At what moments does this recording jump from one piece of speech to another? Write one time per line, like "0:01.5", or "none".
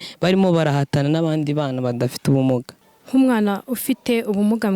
0:02.9